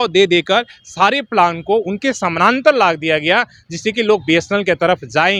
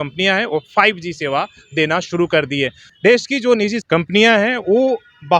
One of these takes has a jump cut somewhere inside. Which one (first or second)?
second